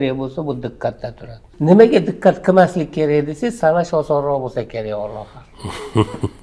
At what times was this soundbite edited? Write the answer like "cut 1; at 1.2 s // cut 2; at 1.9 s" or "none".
cut 1; at 1.5 s